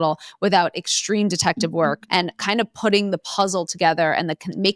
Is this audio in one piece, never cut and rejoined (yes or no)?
no